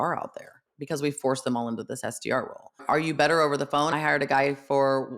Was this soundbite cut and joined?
yes; 1 cut; at 2.9 s

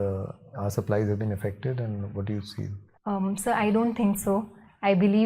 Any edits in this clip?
yes; 1 cut; at 2.8 s

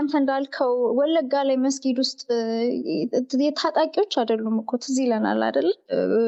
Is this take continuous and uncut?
yes; 0 cuts

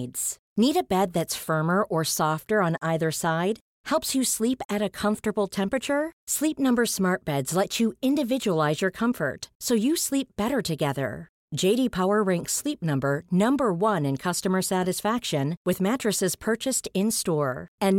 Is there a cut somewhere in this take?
no; 0 cuts

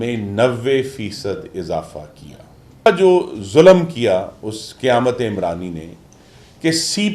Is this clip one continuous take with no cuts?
no; 1 cut; at 2.9 s

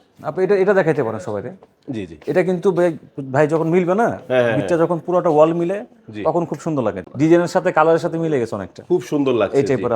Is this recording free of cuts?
no; 1 cut; at 7.1 s

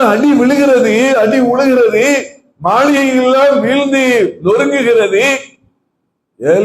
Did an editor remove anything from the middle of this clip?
no; 0 cuts

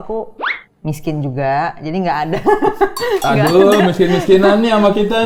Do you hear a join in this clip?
no; 0 cuts

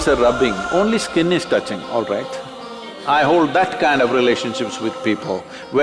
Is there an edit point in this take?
yes; 1 cut; at 2.9 s

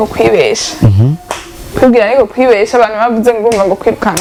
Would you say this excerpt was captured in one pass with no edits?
yes; 0 cuts

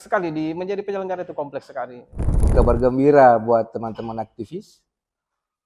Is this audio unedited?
no; 1 cut; at 2.4 s

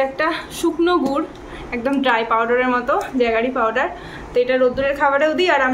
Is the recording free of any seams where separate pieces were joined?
yes; 0 cuts

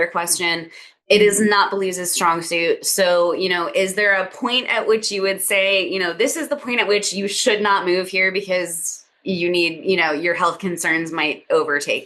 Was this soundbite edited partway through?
no; 0 cuts

